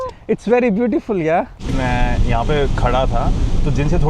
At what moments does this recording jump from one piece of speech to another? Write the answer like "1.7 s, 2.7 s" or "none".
1.7 s